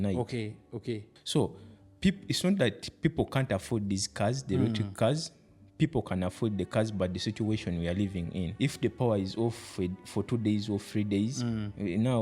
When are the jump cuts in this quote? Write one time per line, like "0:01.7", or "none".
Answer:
0:01.1
0:08.5